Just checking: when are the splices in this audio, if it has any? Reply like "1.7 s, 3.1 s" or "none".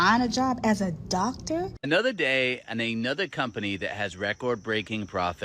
1.8 s